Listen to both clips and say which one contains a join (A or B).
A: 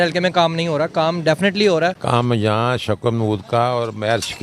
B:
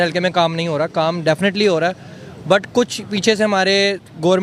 A